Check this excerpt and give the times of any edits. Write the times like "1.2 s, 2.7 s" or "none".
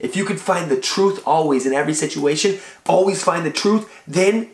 none